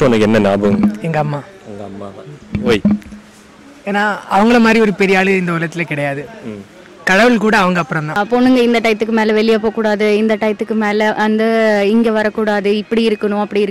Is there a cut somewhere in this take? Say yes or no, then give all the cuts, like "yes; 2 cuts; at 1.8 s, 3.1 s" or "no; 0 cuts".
yes; 1 cut; at 8.1 s